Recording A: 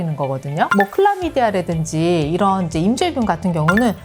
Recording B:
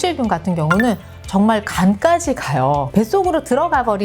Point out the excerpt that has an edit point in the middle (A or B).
B